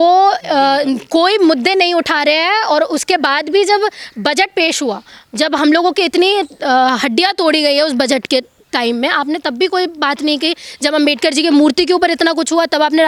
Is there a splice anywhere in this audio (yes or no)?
no